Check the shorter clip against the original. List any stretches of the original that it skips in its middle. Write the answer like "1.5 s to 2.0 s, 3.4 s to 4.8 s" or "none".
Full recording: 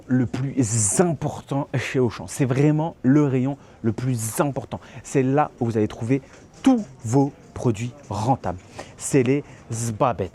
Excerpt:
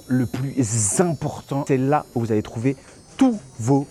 1.6 s to 5.1 s